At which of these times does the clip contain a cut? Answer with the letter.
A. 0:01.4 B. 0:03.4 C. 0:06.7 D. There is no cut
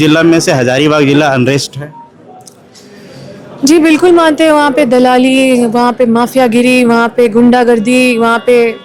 D